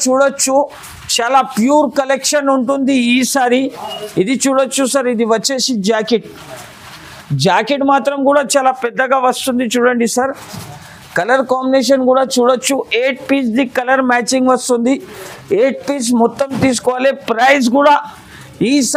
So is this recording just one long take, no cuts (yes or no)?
yes